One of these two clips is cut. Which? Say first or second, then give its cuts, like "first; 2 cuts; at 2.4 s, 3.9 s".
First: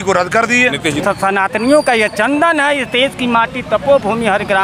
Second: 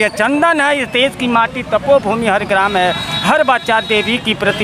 first; 1 cut; at 1.0 s